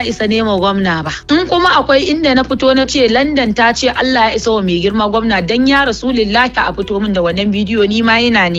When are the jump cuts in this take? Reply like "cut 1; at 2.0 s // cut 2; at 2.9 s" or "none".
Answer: cut 1; at 1.1 s